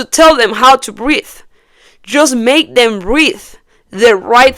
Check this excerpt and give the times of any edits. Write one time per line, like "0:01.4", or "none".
none